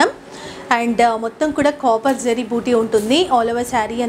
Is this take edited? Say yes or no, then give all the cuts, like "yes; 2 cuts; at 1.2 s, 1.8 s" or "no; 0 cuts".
no; 0 cuts